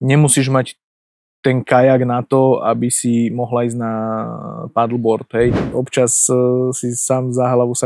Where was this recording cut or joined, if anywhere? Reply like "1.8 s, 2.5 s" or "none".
5.6 s